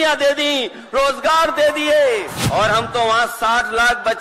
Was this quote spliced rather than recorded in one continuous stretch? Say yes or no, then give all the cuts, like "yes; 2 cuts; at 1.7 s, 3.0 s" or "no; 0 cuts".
yes; 1 cut; at 2.4 s